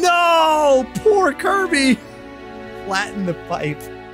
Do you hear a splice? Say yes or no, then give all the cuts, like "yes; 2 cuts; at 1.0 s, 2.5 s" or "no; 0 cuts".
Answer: no; 0 cuts